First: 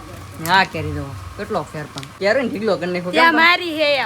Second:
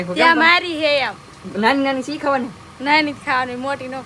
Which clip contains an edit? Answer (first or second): first